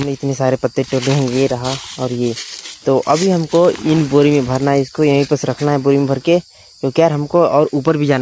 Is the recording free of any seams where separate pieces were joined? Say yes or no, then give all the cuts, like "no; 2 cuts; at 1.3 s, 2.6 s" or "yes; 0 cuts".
yes; 0 cuts